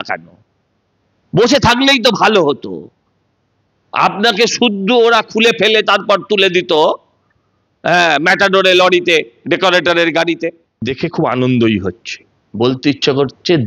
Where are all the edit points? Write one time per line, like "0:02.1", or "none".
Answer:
0:10.9